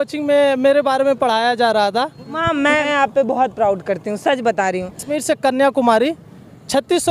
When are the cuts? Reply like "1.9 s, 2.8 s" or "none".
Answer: 2.7 s, 5.1 s